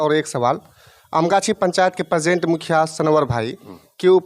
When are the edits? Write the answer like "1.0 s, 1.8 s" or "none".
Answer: none